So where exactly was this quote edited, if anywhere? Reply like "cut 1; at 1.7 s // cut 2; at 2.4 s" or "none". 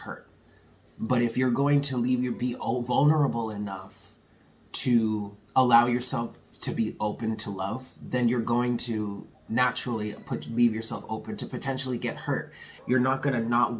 cut 1; at 5.4 s // cut 2; at 9.3 s // cut 3; at 12.7 s